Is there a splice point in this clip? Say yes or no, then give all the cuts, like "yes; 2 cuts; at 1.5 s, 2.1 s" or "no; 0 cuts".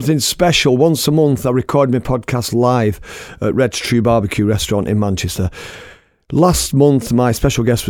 no; 0 cuts